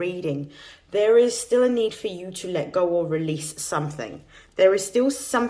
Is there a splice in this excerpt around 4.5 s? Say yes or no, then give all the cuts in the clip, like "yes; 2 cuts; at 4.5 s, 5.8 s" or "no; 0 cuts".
no; 0 cuts